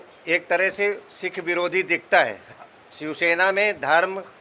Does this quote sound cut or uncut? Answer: cut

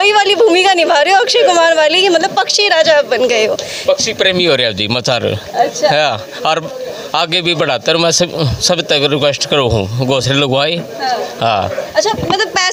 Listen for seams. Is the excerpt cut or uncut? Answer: uncut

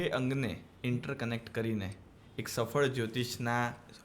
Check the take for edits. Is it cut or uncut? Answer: uncut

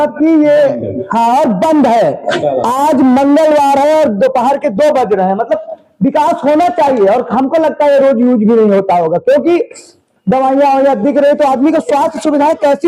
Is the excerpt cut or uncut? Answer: uncut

